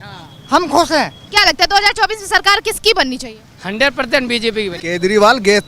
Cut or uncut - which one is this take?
cut